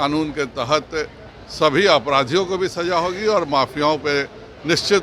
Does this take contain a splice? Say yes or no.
no